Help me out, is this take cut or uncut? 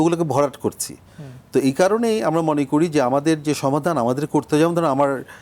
uncut